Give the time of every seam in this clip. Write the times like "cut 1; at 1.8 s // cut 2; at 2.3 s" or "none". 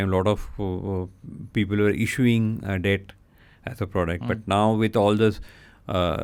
none